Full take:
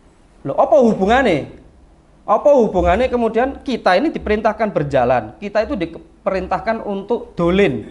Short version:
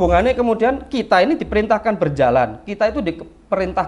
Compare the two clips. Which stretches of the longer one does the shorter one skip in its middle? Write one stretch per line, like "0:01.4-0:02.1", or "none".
none